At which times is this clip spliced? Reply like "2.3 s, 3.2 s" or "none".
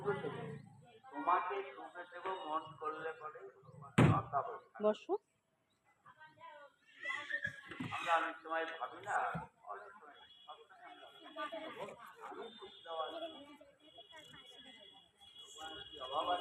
9.9 s